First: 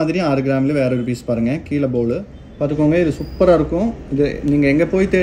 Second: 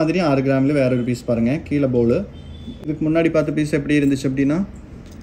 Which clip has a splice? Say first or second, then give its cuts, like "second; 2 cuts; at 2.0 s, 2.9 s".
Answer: first; 1 cut; at 2.4 s